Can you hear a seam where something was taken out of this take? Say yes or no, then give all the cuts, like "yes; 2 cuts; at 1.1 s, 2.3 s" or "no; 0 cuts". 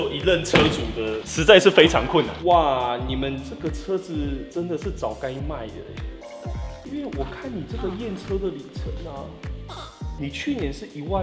yes; 1 cut; at 2.3 s